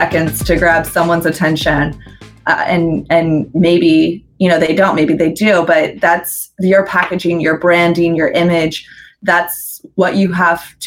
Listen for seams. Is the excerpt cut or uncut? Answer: uncut